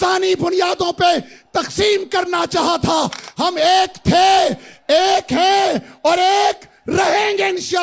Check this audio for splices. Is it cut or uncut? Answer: uncut